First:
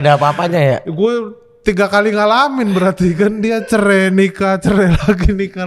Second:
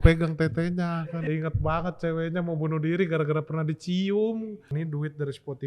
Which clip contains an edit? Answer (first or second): second